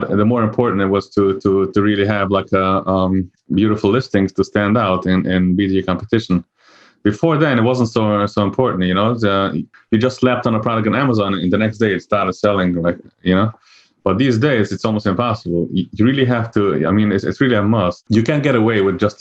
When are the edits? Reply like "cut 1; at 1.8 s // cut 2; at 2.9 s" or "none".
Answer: cut 1; at 18.0 s